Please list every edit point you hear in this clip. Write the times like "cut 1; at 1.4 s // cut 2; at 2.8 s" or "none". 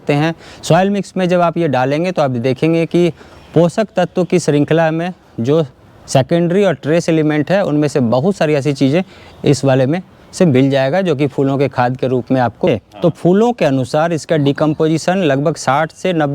cut 1; at 12.7 s